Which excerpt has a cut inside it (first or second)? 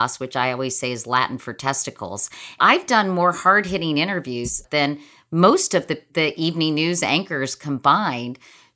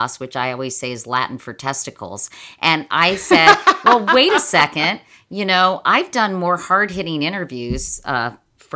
first